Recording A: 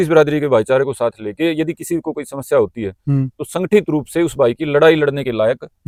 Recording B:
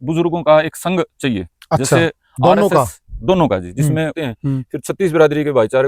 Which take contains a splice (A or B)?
B